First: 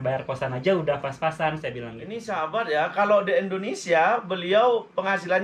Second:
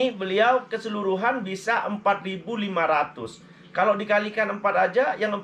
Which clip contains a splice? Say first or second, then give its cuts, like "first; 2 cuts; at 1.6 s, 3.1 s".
first; 1 cut; at 2.1 s